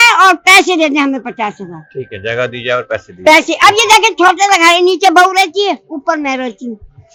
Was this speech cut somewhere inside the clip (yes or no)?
no